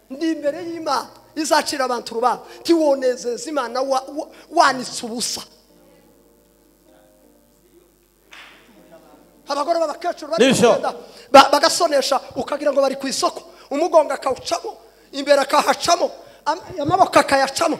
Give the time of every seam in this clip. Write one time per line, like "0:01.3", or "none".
none